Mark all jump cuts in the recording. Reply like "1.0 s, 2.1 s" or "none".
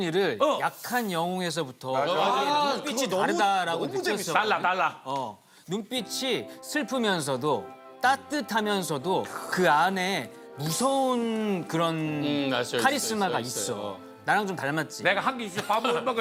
none

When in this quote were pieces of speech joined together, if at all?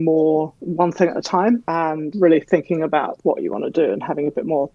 1.7 s, 3.1 s

